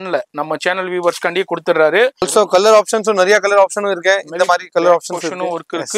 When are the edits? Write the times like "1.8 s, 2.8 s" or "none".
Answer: 2.3 s